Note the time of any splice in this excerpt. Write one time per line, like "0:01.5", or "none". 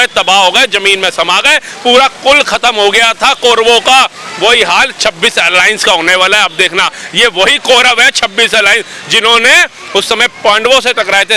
none